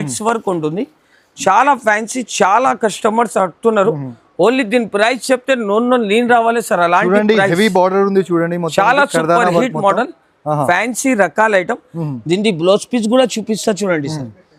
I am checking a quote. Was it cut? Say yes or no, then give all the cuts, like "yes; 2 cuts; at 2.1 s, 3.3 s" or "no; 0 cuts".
no; 0 cuts